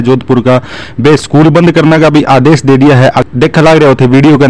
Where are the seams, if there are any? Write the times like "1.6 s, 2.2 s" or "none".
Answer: 3.2 s